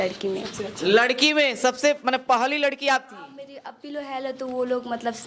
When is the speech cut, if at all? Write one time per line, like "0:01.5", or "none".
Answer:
none

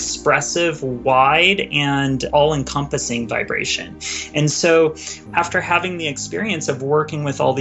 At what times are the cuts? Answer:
0:02.2
0:05.2

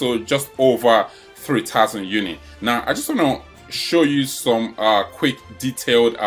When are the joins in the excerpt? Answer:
none

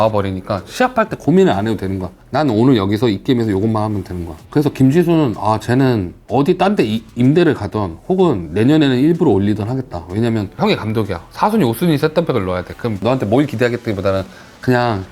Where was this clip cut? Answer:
0:01.2
0:06.2
0:10.6
0:13.0

